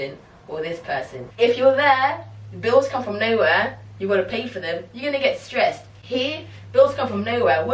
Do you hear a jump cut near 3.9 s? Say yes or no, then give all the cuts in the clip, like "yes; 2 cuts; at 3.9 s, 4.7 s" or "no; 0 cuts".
no; 1 cut; at 1.2 s